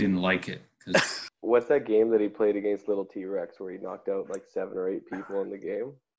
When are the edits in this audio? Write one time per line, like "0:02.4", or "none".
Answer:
0:01.3